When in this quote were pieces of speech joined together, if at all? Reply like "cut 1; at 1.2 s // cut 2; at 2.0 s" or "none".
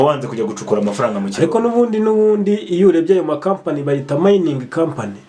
none